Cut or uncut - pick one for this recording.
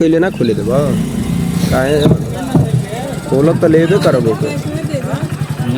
uncut